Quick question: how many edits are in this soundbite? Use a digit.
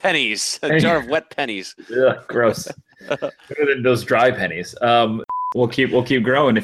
1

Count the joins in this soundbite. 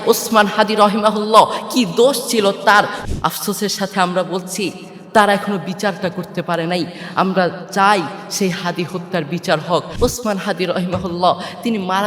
2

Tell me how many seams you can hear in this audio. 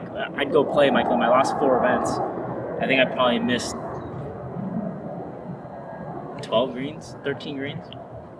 0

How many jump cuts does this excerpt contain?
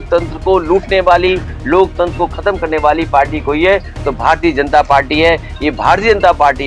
0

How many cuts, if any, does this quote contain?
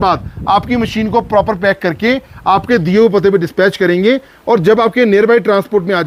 0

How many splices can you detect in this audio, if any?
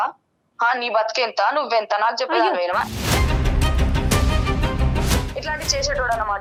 0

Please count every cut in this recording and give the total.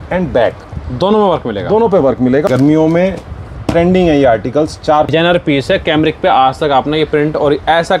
2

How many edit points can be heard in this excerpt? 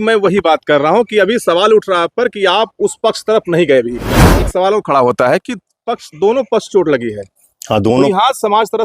1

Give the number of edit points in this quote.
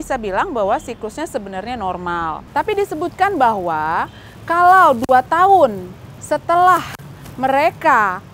1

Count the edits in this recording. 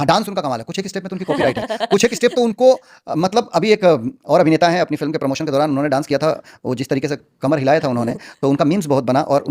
1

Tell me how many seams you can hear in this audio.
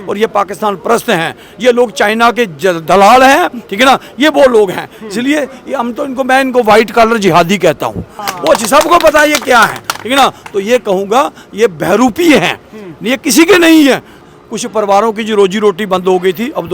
2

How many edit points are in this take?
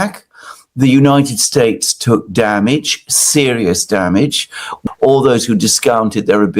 1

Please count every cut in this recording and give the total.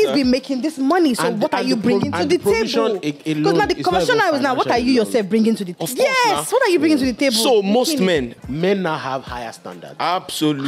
1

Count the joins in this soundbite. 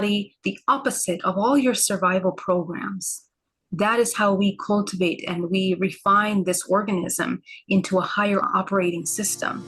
1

